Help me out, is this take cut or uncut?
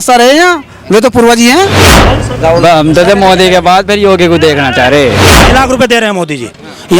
cut